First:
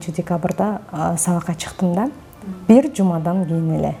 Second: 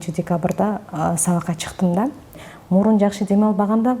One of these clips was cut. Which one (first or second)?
second